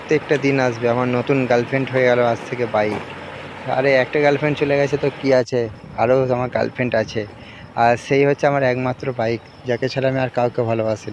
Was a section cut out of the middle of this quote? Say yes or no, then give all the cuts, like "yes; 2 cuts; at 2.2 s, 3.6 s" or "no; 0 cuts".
no; 0 cuts